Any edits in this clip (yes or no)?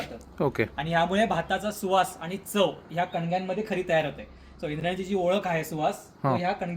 no